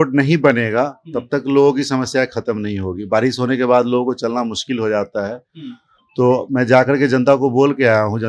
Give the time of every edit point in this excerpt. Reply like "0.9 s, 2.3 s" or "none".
none